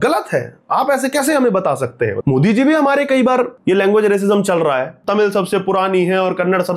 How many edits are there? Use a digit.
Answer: 3